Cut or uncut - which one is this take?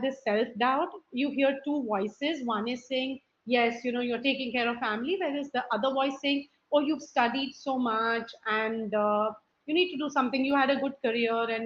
uncut